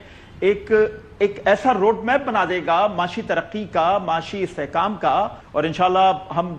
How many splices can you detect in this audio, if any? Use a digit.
1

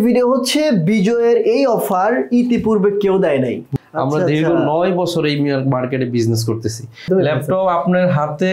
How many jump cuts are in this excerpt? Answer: 2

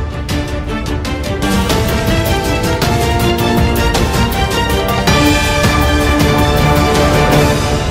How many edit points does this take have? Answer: 1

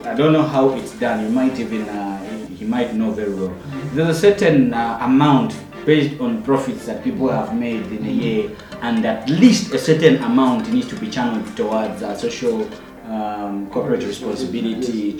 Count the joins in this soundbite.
0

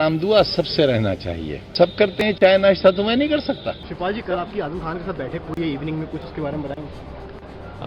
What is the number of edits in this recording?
2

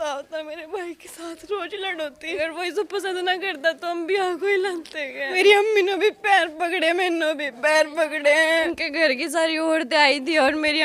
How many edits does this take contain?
3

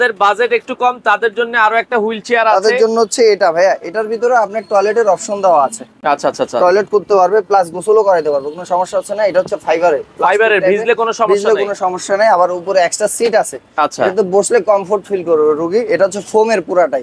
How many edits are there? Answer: 0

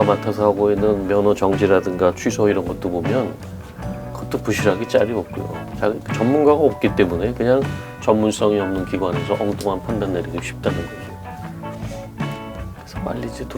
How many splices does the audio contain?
1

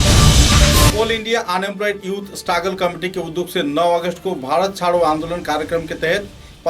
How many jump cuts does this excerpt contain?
1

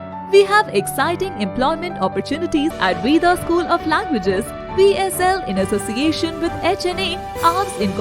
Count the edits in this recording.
1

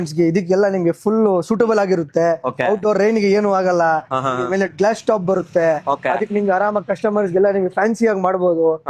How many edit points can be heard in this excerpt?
0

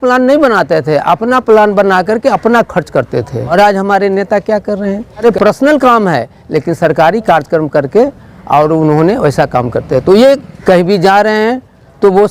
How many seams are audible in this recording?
3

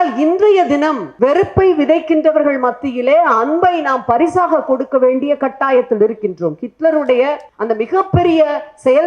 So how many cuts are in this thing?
2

